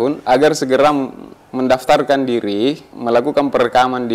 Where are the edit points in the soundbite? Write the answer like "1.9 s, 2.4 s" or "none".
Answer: 2.9 s

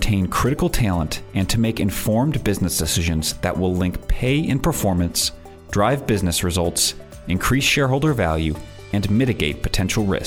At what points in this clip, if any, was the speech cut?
none

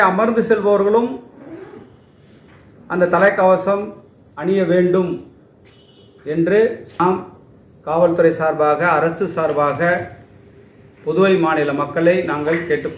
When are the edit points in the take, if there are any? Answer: 7.0 s

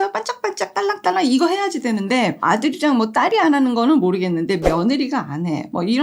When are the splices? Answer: 2.4 s

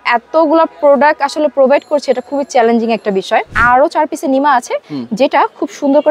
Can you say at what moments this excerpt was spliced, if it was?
3.5 s

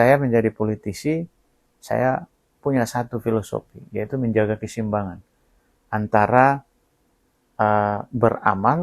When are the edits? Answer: 3.2 s

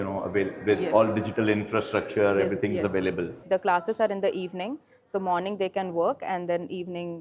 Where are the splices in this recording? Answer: 3.4 s

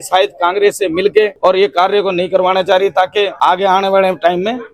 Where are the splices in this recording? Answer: 1.3 s, 3.3 s

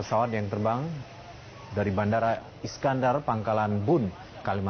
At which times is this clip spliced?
2.9 s

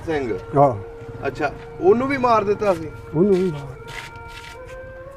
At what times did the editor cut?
none

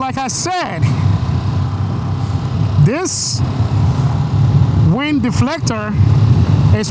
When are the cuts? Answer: none

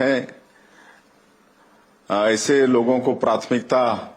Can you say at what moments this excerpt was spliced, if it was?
3.2 s

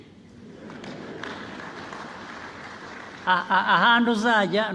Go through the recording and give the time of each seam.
none

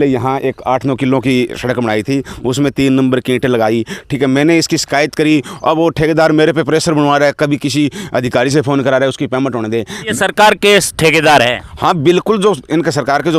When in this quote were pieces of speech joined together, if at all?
10.1 s

